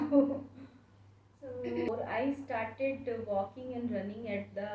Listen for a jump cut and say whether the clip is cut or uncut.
cut